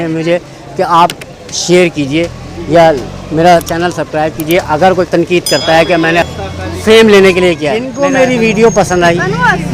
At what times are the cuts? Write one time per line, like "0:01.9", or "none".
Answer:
0:05.1
0:06.3
0:07.9